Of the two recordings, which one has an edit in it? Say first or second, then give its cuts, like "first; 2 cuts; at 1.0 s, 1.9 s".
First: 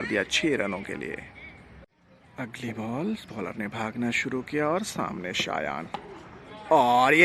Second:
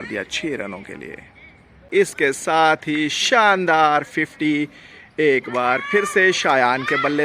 second; 1 cut; at 1.9 s